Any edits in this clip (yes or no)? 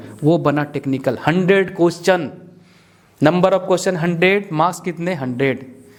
no